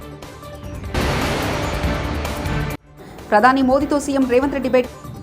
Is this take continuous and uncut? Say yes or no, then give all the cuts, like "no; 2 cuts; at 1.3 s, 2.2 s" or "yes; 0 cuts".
no; 2 cuts; at 0.9 s, 2.7 s